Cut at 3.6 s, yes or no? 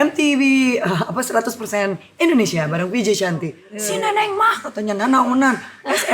yes